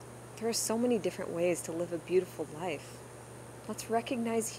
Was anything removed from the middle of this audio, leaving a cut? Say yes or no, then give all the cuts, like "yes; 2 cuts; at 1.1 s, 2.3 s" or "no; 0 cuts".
no; 0 cuts